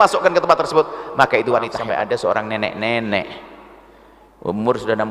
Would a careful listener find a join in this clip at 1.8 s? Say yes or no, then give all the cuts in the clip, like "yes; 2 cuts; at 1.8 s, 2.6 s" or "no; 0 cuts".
yes; 1 cut; at 1.8 s